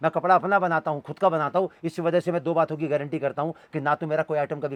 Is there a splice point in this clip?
no; 0 cuts

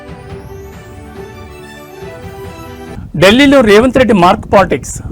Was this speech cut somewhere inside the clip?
yes; 1 cut; at 2.1 s

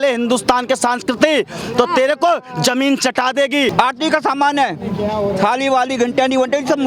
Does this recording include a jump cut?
yes; 1 cut; at 3.7 s

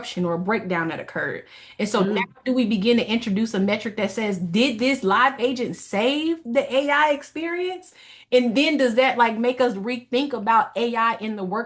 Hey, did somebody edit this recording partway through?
no; 0 cuts

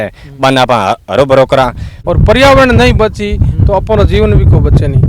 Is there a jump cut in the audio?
yes; 1 cut; at 1.9 s

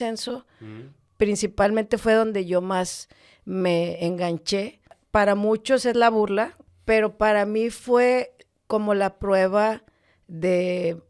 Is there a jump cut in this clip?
yes; 2 cuts; at 4.9 s, 6.7 s

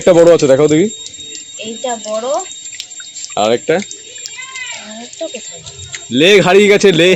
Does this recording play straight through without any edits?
yes; 0 cuts

